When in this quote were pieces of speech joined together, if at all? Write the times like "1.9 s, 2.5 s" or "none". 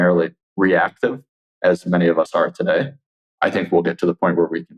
none

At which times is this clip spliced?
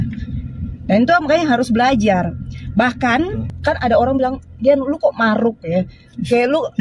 3.5 s

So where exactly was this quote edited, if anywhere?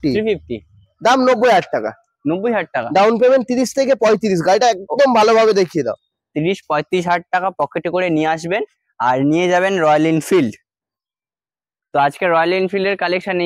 none

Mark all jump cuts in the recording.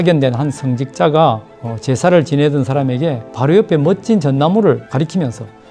3.3 s, 4.9 s

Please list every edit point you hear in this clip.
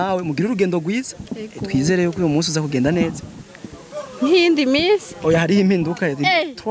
none

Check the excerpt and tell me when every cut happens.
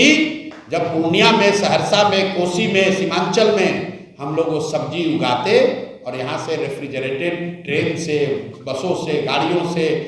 none

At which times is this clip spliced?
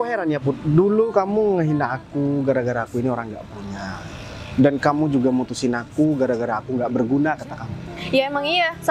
none

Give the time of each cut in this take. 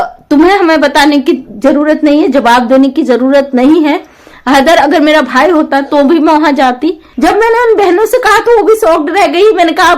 6.9 s

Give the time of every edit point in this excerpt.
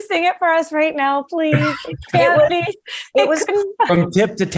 none

